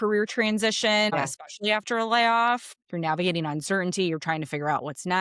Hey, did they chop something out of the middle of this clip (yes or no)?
yes